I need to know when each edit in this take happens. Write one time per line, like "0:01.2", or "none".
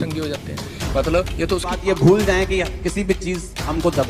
0:01.8